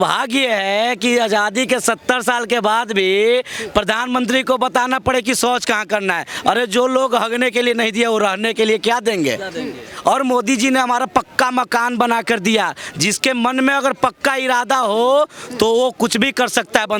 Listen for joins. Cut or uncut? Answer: uncut